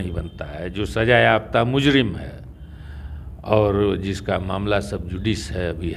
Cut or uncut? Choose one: uncut